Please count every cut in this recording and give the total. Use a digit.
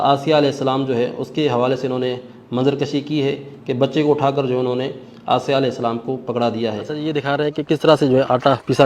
1